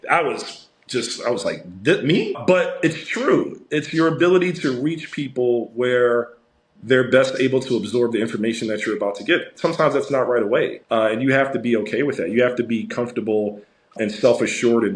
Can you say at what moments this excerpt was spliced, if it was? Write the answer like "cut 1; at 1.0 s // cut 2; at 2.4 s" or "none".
cut 1; at 2.4 s // cut 2; at 10.8 s // cut 3; at 14.0 s